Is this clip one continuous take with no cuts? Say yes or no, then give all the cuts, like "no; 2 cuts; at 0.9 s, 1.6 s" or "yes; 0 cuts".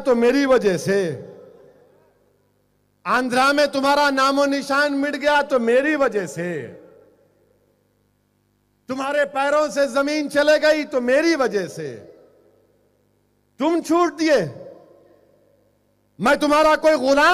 no; 1 cut; at 1.6 s